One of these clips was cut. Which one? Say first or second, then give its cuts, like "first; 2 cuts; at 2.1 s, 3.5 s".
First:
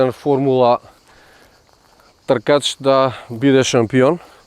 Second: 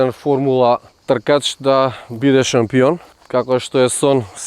second; 2 cuts; at 0.9 s, 3.1 s